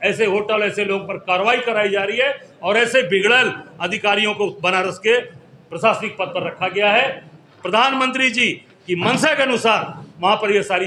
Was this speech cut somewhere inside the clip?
no; 0 cuts

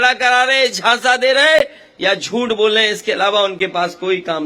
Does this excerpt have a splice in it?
no; 0 cuts

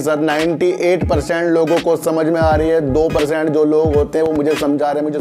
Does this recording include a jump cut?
no; 0 cuts

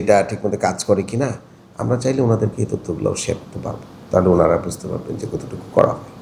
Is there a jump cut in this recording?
no; 0 cuts

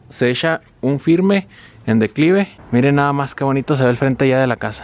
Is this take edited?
yes; 1 cut; at 2.6 s

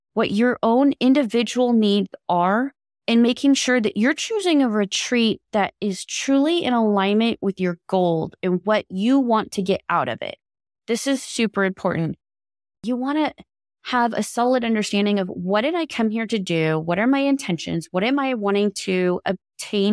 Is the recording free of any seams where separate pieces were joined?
no; 1 cut; at 12.6 s

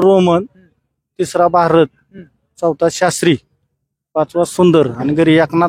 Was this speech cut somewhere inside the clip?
no; 0 cuts

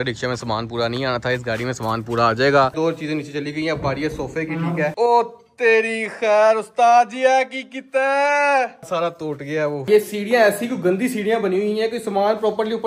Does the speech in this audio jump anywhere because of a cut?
yes; 3 cuts; at 2.7 s, 4.9 s, 9.9 s

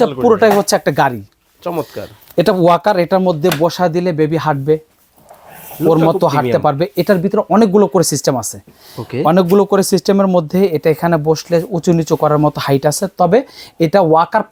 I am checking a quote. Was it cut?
no; 0 cuts

